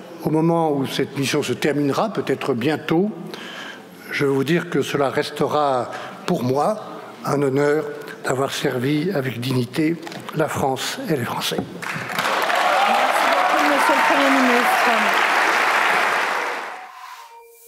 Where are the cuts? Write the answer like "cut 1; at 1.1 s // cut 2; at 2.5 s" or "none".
cut 1; at 16.7 s